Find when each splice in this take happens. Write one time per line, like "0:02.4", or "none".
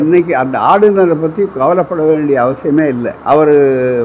0:03.1

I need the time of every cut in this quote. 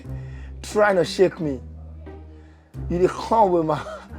none

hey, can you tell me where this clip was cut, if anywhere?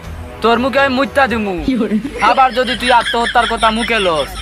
none

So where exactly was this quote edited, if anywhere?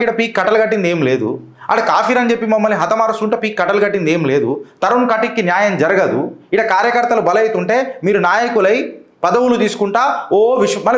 none

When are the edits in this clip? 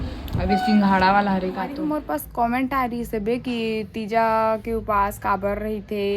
0:01.8

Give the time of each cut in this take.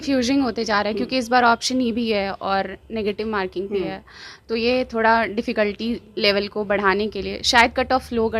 none

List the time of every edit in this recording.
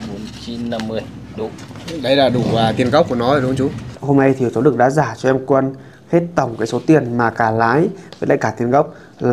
0:03.9

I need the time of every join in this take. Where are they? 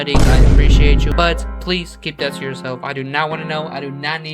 0:01.1

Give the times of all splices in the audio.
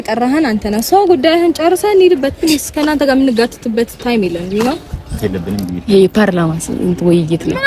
0:05.2

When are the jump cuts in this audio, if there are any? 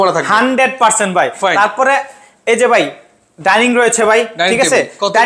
none

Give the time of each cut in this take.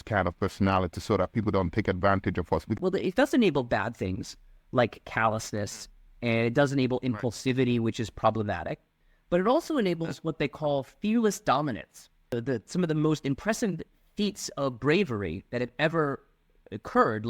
0:02.8
0:12.4

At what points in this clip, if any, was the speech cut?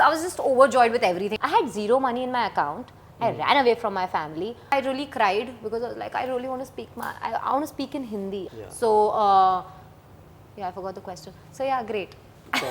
0:01.3
0:04.7
0:08.4

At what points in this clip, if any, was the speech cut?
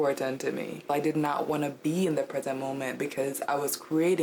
0:00.9

